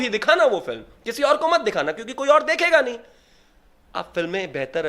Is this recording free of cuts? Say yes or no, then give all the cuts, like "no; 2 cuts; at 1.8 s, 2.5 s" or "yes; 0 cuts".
yes; 0 cuts